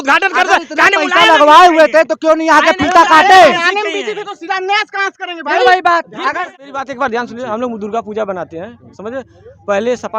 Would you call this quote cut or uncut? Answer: cut